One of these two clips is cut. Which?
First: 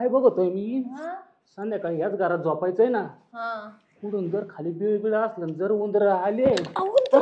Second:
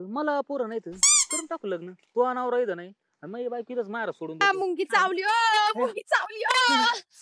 second; 1 cut; at 4.4 s

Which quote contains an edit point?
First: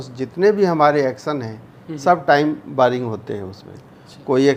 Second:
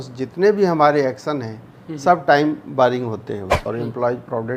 second; 1 cut; at 3.5 s

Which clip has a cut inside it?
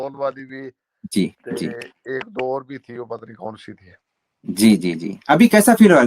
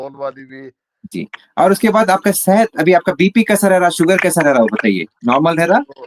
second; 1 cut; at 1.1 s

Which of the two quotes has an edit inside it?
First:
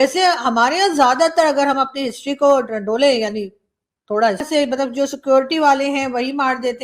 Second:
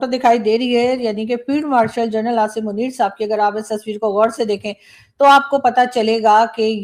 first; 1 cut; at 4.4 s

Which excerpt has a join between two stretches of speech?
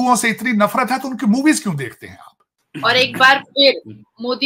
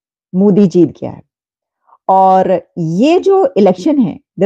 first; 1 cut; at 2.7 s

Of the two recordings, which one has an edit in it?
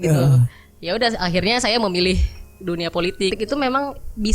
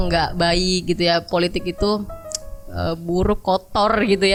first; 1 cut; at 3.3 s

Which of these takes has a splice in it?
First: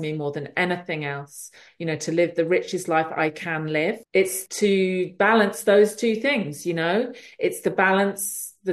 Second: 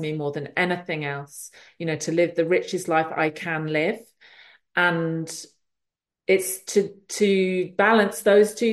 first; 1 cut; at 4.4 s

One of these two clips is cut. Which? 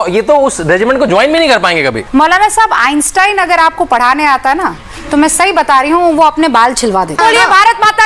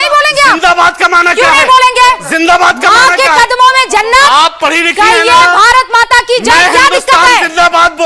first; 2 cuts; at 2.0 s, 7.2 s

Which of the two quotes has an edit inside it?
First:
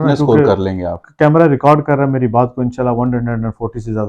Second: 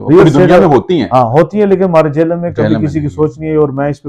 first; 1 cut; at 1.0 s

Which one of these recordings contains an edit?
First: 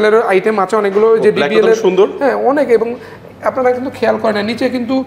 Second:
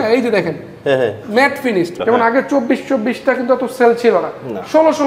second; 1 cut; at 2.0 s

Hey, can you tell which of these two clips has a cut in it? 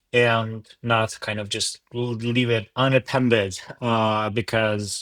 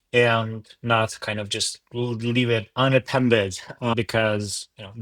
second; 1 cut; at 3.9 s

